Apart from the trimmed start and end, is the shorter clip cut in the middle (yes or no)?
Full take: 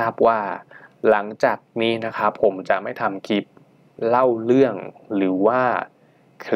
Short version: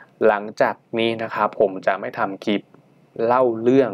no